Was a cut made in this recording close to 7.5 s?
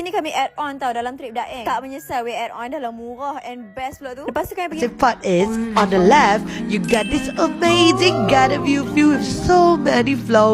no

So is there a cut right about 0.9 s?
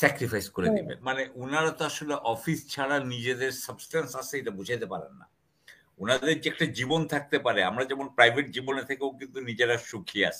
yes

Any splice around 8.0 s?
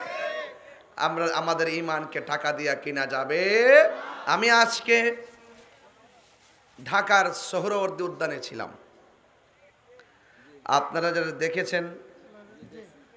no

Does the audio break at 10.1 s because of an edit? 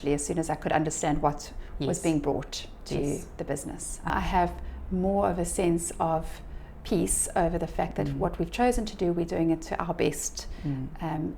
no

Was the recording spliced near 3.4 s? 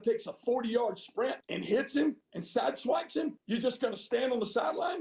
yes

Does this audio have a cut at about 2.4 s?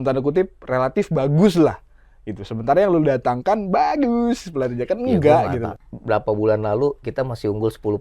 no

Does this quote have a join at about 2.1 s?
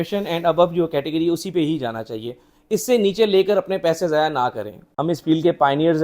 no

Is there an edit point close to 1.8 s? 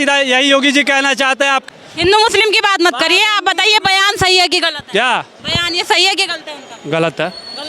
yes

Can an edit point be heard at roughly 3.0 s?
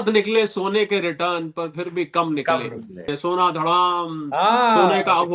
yes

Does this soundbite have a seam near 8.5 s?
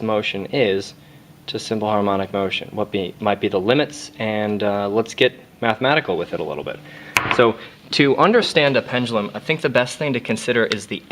no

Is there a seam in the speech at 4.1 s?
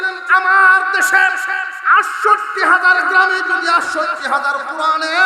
no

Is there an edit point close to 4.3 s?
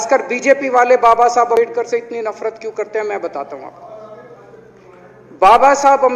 no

